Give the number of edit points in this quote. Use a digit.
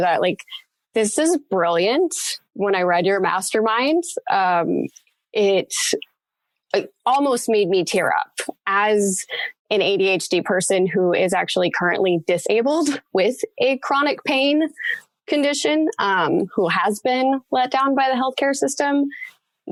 0